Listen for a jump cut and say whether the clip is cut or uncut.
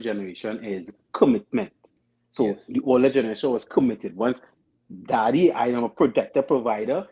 uncut